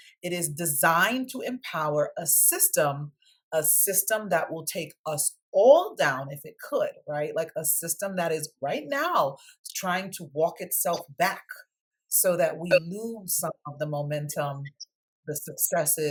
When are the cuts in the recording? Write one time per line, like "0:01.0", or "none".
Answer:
none